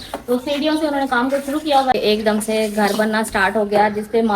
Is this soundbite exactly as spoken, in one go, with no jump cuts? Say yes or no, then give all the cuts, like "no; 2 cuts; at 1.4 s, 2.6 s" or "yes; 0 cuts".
no; 1 cut; at 1.9 s